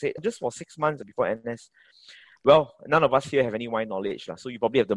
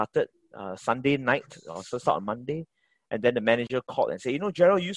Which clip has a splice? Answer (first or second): first